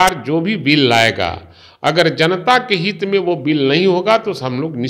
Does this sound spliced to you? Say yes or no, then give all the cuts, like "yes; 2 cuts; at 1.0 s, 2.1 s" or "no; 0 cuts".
no; 0 cuts